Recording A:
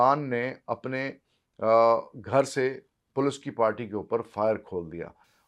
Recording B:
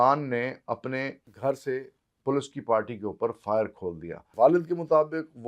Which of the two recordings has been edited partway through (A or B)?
B